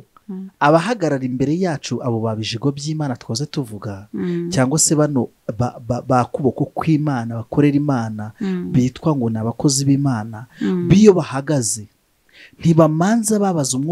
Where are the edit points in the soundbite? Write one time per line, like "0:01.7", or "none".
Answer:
none